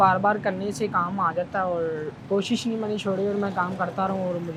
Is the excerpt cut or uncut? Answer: uncut